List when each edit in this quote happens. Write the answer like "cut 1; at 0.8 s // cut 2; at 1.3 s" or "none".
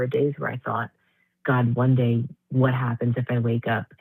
none